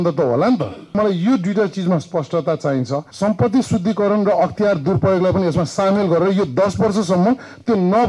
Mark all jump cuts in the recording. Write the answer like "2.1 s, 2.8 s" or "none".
1.0 s, 3.0 s